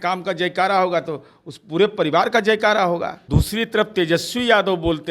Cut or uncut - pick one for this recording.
cut